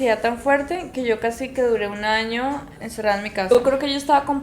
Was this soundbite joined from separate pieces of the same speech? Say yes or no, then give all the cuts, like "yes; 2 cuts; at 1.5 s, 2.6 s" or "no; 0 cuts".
yes; 1 cut; at 3.5 s